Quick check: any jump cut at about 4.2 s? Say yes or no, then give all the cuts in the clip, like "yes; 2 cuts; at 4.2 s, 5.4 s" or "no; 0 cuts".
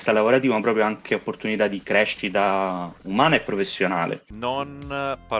yes; 1 cut; at 4.2 s